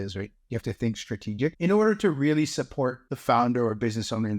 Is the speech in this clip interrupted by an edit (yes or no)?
yes